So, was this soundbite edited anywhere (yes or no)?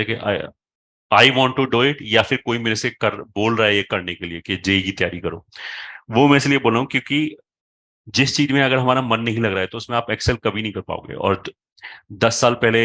no